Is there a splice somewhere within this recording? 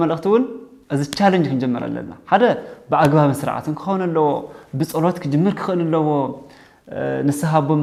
no; 0 cuts

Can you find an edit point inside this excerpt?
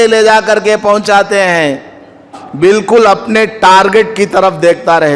yes; 1 cut; at 2.4 s

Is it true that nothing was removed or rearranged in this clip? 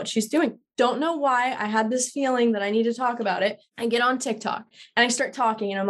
no; 2 cuts; at 3.7 s, 4.7 s

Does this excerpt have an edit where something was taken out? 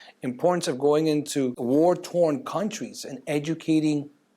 yes; 1 cut; at 1.6 s

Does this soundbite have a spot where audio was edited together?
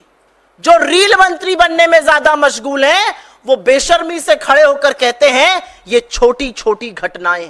no; 0 cuts

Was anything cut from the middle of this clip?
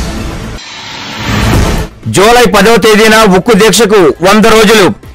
yes; 1 cut; at 1.3 s

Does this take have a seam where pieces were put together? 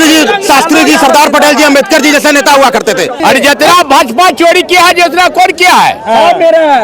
yes; 1 cut; at 3.2 s

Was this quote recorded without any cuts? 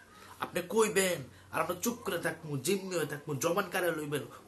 yes; 0 cuts

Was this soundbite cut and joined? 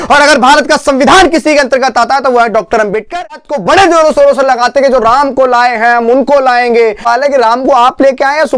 yes; 2 cuts; at 3.5 s, 7.0 s

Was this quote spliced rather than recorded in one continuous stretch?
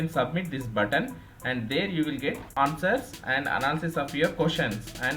no; 0 cuts

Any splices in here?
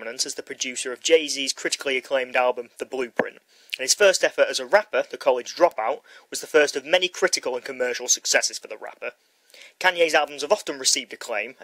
yes; 1 cut; at 6.7 s

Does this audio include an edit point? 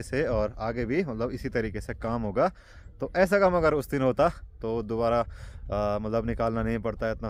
no; 0 cuts

